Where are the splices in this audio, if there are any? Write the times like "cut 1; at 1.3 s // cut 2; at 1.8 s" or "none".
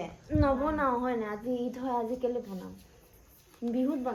none